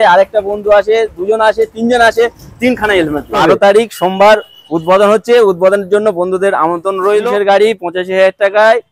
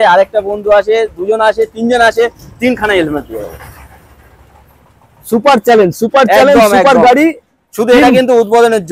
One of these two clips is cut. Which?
first; 2 cuts; at 3.3 s, 7.3 s

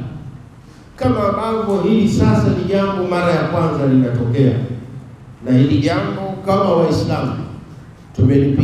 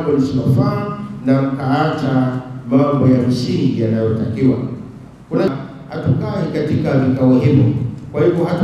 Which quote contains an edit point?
second; 1 cut; at 5.5 s

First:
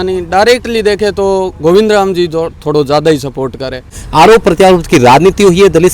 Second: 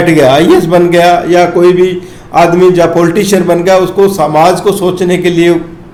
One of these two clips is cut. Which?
first; 1 cut; at 4.0 s

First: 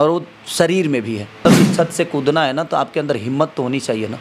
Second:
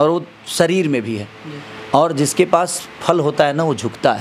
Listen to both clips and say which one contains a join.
first; 1 cut; at 1.4 s

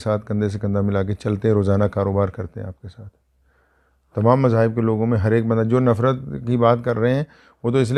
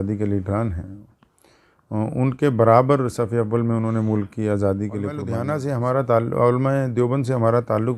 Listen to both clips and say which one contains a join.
second; 1 cut; at 5.3 s

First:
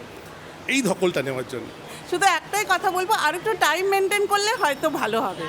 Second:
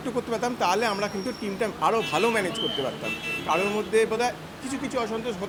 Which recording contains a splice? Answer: first; 1 cut; at 1.9 s

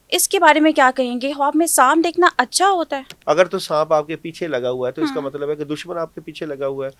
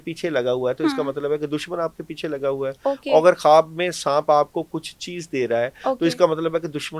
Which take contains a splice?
first; 1 cut; at 3.1 s

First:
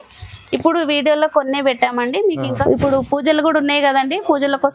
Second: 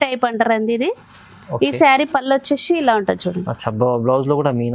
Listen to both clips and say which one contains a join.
first; 1 cut; at 2.6 s

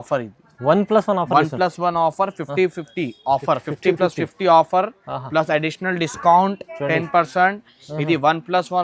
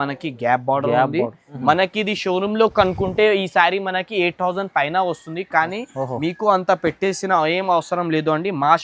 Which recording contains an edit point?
second; 1 cut; at 1.5 s

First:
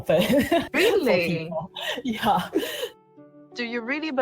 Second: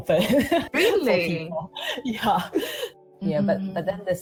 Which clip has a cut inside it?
first; 1 cut; at 3.3 s

